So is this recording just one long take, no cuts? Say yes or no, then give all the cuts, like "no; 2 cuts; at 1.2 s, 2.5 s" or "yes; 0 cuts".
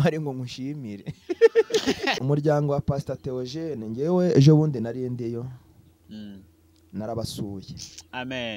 no; 1 cut; at 2.2 s